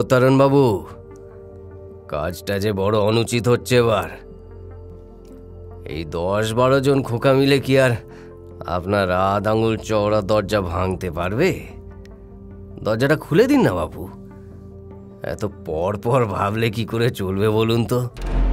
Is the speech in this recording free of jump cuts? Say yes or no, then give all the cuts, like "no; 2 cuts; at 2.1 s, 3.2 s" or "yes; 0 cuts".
yes; 0 cuts